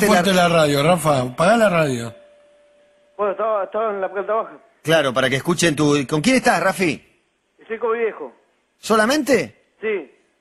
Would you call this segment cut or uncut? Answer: uncut